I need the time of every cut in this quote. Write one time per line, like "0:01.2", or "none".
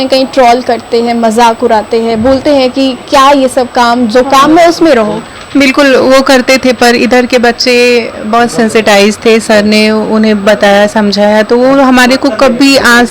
none